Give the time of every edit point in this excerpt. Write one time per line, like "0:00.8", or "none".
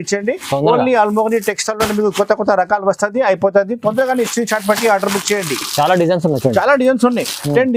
none